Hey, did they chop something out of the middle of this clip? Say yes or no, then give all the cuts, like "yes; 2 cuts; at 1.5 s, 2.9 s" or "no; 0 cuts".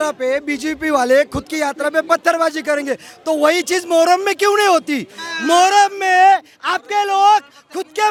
no; 0 cuts